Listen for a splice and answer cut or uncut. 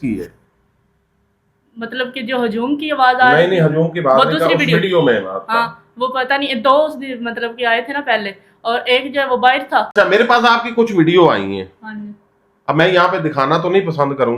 cut